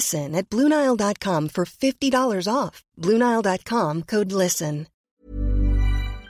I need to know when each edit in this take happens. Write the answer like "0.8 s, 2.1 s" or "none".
5.0 s